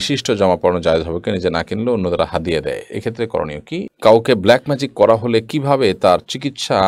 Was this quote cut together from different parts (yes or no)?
yes